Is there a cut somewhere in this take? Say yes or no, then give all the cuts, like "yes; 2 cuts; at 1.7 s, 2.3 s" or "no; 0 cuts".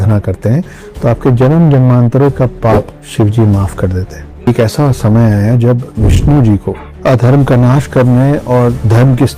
yes; 2 cuts; at 3.0 s, 4.5 s